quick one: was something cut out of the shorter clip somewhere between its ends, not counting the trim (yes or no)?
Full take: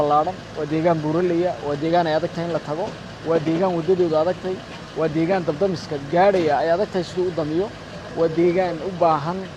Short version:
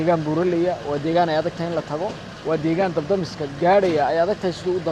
yes